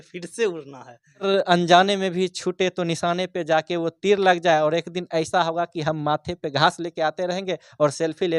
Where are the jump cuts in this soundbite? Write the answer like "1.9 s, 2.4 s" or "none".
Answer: 1.3 s